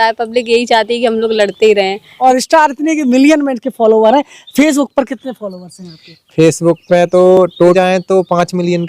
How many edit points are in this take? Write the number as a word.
two